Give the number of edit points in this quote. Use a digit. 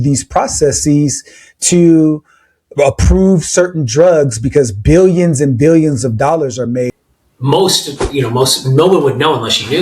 1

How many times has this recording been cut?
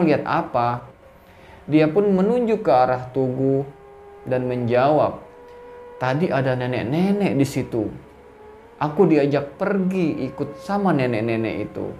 1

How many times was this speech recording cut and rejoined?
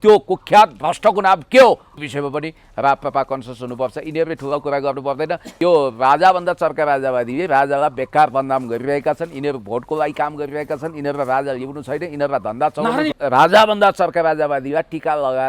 3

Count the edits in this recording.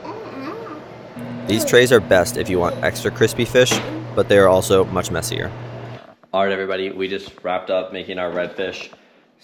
0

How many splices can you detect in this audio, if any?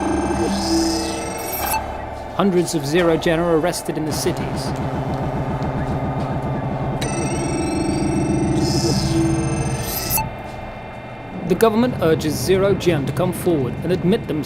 1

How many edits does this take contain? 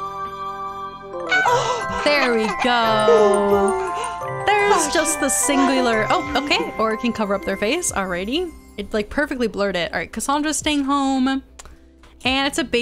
0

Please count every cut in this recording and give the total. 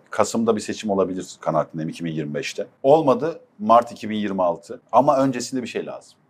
2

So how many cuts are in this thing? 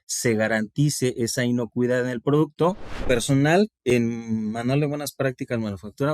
1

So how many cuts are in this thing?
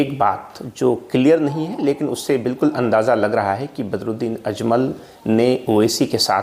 0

